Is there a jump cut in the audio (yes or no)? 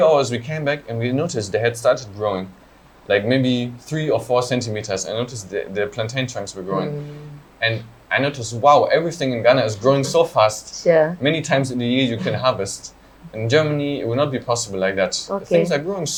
no